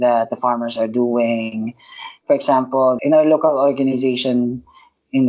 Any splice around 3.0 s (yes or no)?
yes